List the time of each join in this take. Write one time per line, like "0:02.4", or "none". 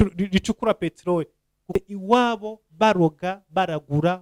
0:01.8